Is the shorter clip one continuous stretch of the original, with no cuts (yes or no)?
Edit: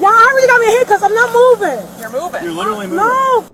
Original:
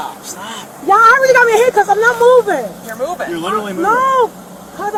yes